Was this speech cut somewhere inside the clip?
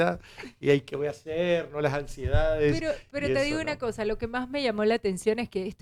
no; 0 cuts

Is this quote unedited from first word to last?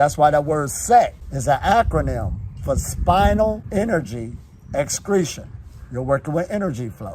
no; 2 cuts; at 1.3 s, 3.6 s

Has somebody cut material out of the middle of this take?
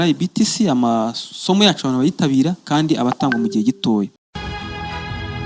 yes; 1 cut; at 4.2 s

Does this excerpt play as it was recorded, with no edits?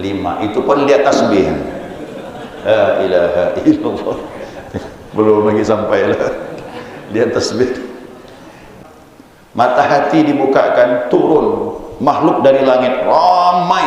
no; 1 cut; at 8.7 s

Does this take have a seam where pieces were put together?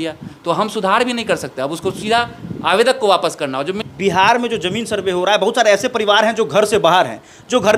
yes; 1 cut; at 3.8 s

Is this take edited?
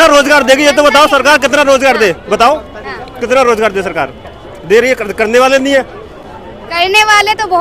no; 0 cuts

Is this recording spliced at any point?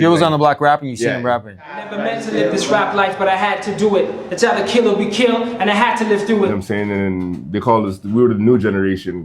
yes; 1 cut; at 6.5 s

